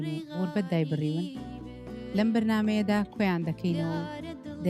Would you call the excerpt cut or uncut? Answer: uncut